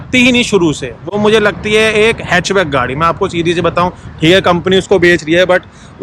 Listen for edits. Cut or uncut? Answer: uncut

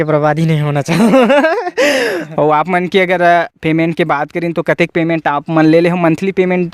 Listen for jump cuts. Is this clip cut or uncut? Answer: cut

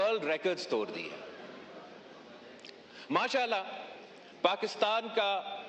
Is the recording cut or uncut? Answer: uncut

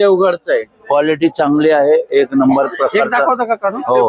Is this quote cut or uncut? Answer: uncut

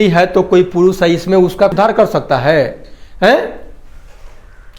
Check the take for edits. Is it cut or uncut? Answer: cut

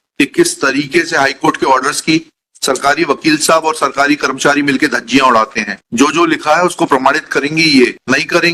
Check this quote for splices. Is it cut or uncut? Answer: uncut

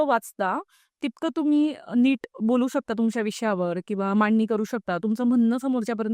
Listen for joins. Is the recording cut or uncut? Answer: uncut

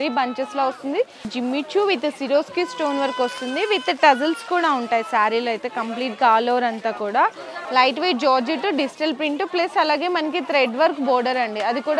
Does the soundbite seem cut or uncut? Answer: cut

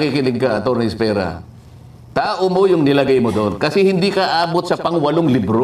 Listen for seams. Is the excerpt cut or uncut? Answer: uncut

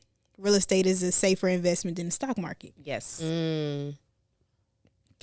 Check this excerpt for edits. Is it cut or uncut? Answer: uncut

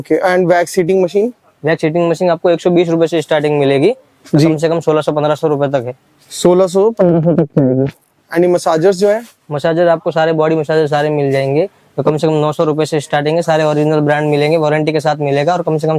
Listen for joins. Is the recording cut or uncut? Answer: uncut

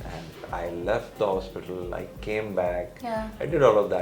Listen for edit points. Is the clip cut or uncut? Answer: uncut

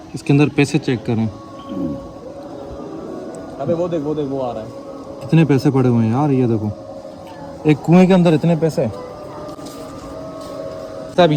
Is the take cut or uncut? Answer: uncut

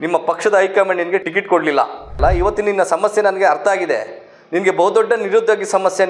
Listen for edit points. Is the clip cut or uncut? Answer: cut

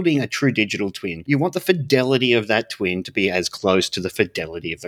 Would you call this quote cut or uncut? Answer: cut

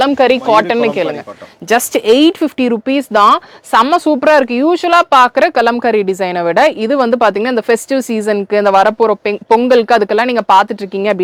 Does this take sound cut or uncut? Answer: uncut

